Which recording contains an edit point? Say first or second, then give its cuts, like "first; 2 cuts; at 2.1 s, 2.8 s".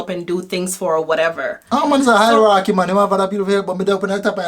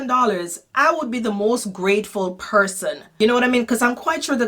second; 1 cut; at 3.0 s